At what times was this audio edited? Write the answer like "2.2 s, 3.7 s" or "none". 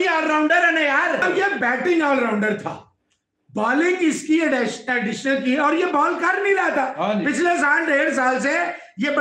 1.2 s